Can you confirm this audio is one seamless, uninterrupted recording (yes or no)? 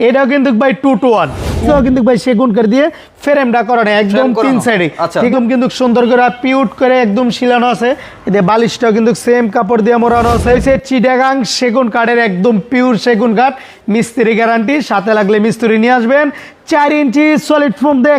no